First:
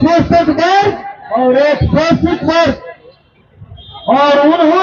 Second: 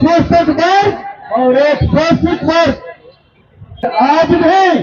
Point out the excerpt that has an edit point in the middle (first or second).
second